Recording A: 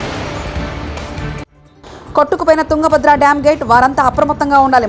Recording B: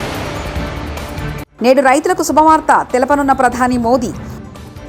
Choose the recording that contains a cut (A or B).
B